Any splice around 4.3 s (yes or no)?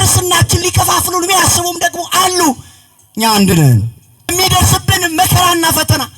yes